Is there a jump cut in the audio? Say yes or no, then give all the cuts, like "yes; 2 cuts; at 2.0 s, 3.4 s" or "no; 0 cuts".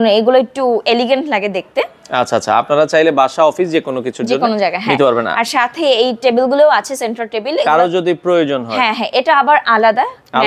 no; 0 cuts